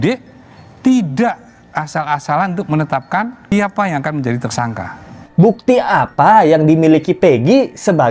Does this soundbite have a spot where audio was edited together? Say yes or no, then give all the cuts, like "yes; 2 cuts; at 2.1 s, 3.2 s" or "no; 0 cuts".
yes; 2 cuts; at 3.4 s, 5.2 s